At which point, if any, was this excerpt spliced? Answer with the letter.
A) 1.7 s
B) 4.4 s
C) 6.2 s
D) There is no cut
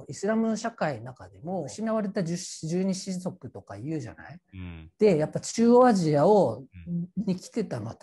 A